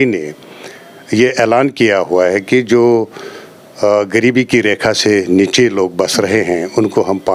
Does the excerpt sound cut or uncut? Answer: uncut